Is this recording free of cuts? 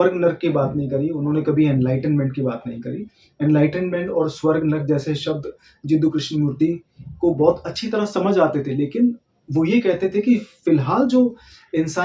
yes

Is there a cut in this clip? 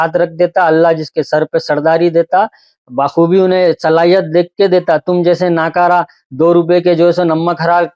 no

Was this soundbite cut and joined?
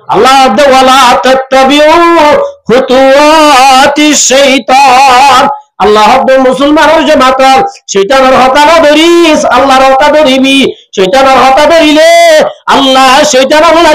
no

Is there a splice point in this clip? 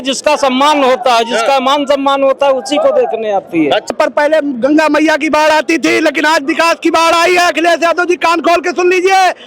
yes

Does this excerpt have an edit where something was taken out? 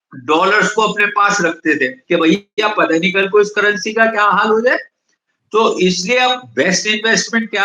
yes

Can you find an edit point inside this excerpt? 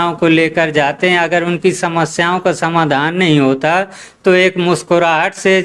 no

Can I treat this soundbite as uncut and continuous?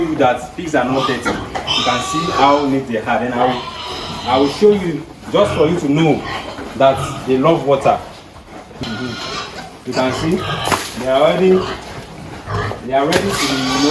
yes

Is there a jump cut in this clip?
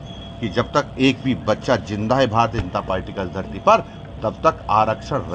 no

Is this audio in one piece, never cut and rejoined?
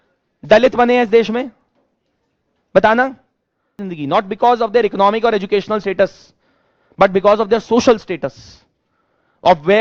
no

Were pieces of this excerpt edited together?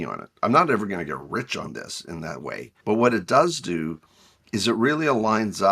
yes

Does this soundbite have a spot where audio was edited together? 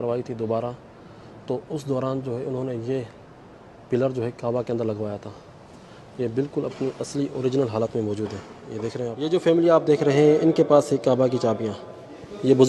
yes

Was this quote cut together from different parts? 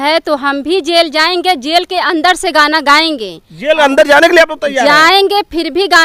no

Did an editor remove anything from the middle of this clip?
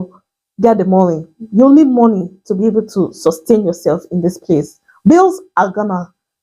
yes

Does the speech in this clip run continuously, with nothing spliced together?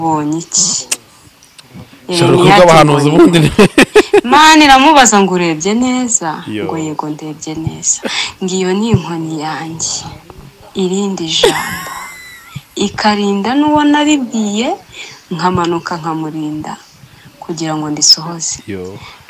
yes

